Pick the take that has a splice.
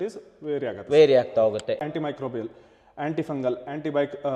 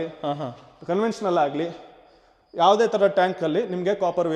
first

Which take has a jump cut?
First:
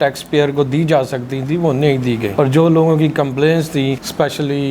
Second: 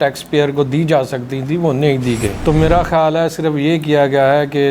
second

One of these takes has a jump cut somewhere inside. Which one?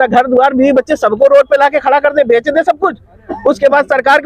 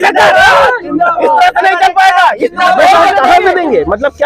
second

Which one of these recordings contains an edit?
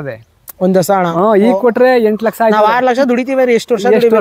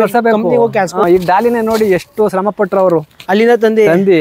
second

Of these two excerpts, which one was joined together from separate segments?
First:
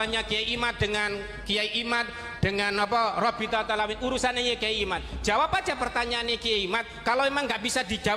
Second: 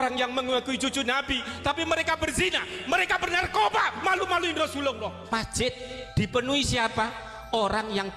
second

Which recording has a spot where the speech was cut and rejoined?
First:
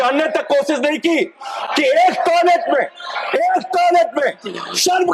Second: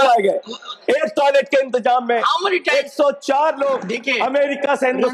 second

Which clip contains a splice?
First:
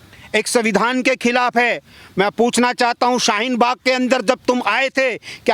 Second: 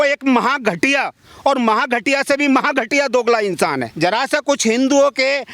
second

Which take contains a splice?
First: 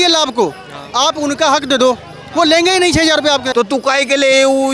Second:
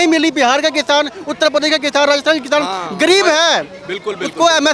first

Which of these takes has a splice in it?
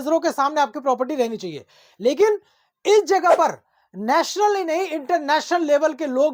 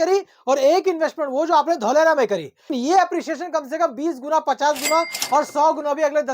second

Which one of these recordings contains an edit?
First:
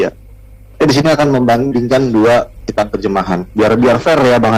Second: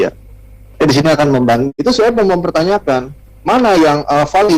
second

